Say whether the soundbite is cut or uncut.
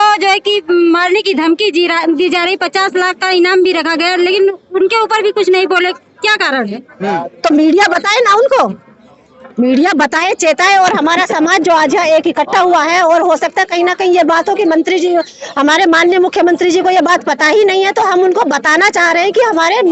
uncut